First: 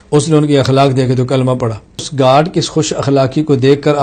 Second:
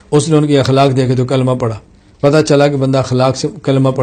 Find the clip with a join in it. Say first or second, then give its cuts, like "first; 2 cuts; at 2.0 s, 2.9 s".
first; 1 cut; at 2.0 s